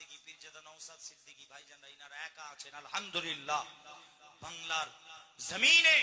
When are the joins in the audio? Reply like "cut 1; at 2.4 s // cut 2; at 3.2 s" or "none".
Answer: cut 1; at 4.6 s